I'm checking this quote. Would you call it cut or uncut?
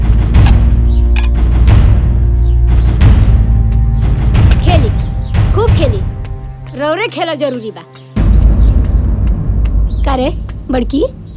uncut